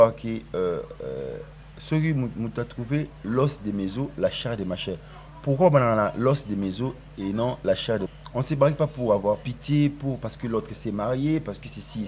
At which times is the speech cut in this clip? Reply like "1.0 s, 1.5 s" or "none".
8.2 s